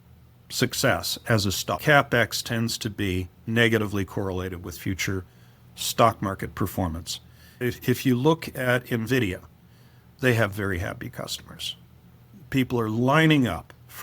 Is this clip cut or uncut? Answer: cut